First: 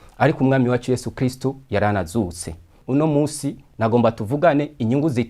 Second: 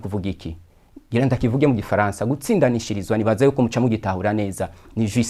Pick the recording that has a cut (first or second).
first